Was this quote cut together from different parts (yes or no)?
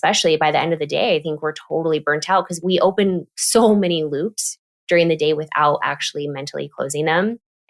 no